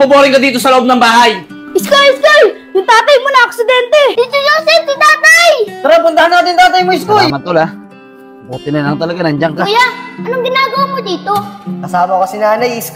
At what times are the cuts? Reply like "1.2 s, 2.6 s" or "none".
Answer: 1.6 s, 4.1 s, 7.3 s, 9.6 s